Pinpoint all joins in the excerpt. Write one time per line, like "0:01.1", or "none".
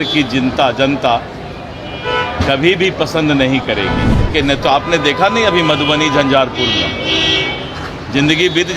0:04.3